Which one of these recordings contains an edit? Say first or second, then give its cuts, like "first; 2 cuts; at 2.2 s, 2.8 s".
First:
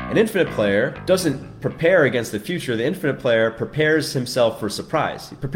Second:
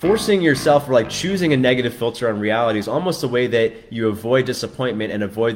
first; 1 cut; at 1.0 s